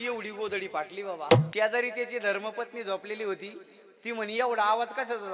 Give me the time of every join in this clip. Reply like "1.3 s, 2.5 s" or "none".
1.5 s